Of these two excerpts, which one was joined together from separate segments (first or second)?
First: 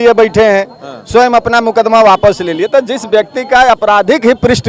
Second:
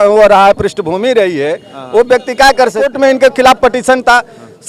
second